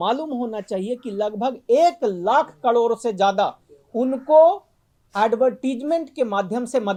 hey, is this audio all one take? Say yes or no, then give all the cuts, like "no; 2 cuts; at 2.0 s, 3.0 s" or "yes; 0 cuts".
yes; 0 cuts